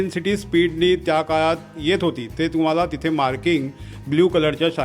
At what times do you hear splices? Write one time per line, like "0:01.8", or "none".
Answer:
none